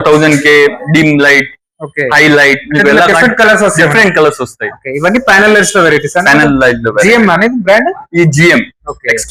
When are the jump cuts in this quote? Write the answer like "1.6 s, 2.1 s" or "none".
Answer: none